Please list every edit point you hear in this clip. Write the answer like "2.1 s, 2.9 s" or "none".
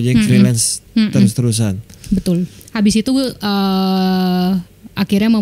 2.6 s